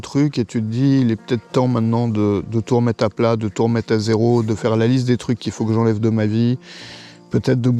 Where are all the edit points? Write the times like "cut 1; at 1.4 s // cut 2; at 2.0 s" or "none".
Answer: none